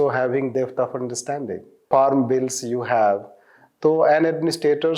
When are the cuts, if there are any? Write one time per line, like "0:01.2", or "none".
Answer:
0:01.8